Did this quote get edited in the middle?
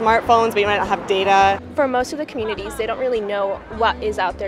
no; 0 cuts

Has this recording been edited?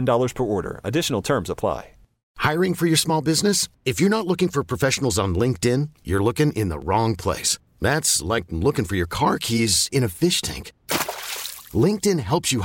yes; 1 cut; at 2.2 s

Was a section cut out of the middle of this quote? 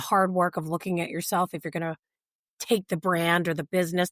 no; 0 cuts

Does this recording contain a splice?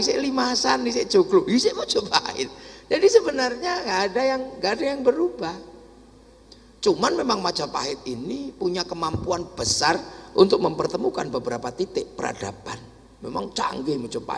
no; 0 cuts

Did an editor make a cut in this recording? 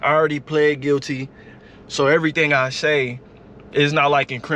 yes; 1 cut; at 1.5 s

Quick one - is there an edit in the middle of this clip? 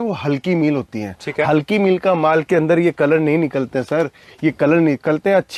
no; 0 cuts

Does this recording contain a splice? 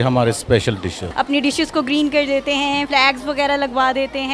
yes; 2 cuts; at 1.0 s, 2.9 s

